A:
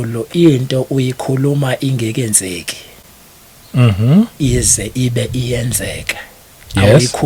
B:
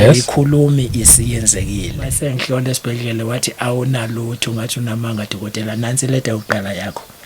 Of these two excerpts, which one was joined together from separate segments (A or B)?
B